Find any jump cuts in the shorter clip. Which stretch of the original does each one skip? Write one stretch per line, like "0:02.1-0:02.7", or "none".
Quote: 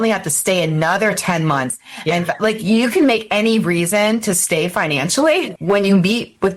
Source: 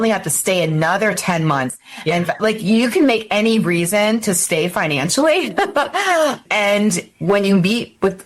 0:05.5-0:07.1